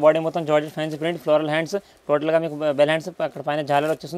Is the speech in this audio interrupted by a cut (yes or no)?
no